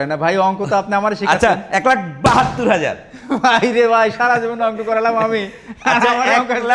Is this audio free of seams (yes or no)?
yes